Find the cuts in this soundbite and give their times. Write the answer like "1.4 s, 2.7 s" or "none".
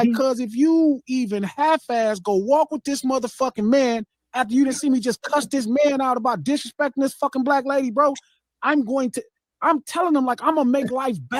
none